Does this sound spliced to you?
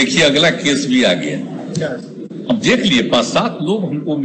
yes; 1 cut; at 2.1 s

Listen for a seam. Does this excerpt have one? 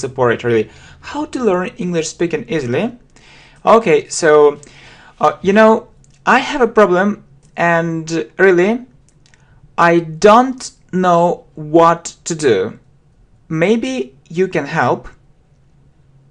no; 0 cuts

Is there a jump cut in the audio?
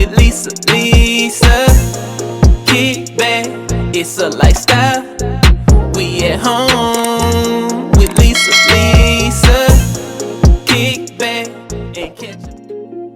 yes; 1 cut; at 12.2 s

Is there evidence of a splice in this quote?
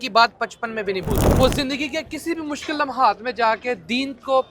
yes; 1 cut; at 1.1 s

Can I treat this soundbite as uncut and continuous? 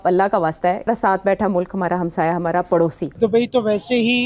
no; 2 cuts; at 0.9 s, 3.0 s

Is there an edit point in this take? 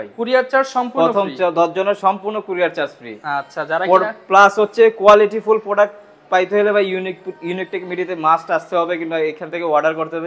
no; 0 cuts

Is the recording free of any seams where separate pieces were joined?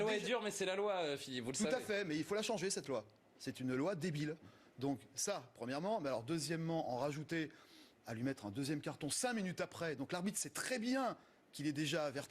no; 1 cut; at 9.7 s

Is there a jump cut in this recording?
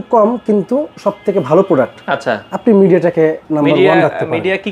yes; 1 cut; at 3.4 s

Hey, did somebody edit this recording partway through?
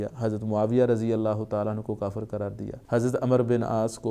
yes; 1 cut; at 2.7 s

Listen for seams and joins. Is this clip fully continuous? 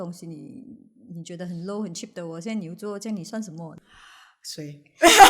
no; 1 cut; at 3.7 s

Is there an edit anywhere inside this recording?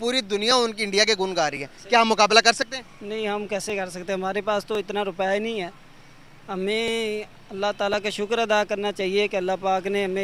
no; 0 cuts

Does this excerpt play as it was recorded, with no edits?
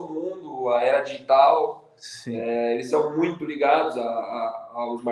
yes; 0 cuts

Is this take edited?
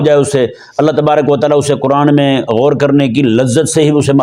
no; 0 cuts

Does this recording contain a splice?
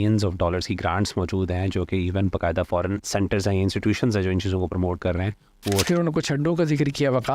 yes; 2 cuts; at 3.0 s, 5.8 s

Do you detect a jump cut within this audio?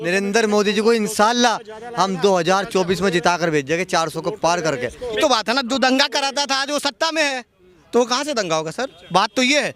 yes; 1 cut; at 5.2 s

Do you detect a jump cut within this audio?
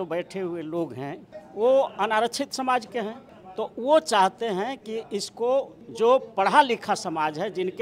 no; 0 cuts

